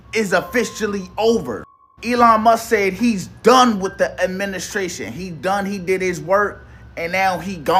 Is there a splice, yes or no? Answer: no